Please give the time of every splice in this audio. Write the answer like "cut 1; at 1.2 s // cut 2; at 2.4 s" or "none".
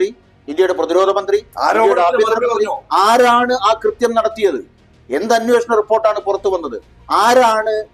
none